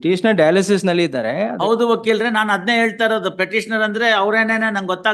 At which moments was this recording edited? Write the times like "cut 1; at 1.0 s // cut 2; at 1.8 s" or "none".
none